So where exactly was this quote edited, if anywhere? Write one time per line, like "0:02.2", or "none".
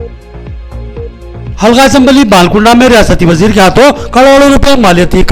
0:01.3